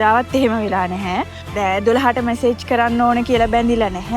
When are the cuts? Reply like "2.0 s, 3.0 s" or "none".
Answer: 1.4 s